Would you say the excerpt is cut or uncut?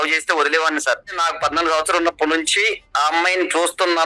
cut